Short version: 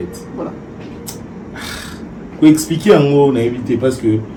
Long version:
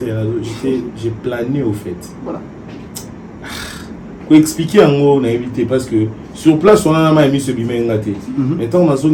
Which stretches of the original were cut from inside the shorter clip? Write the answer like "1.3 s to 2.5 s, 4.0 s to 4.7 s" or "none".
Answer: none